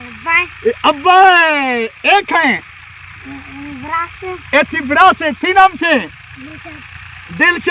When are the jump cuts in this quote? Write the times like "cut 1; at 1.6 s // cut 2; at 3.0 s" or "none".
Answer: none